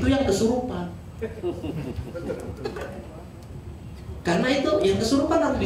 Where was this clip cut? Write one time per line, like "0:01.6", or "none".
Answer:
none